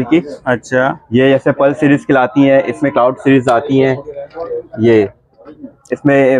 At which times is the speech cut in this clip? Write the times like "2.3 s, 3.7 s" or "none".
none